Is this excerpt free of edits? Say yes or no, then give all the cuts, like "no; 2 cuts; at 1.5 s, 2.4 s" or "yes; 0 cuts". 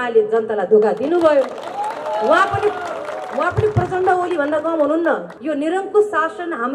no; 1 cut; at 5.3 s